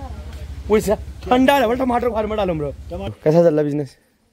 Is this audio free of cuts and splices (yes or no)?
no